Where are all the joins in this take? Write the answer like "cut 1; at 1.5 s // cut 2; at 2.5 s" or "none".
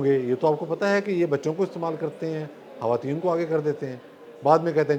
none